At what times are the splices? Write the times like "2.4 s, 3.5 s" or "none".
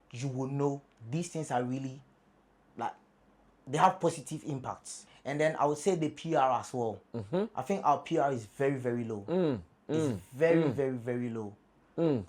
5.0 s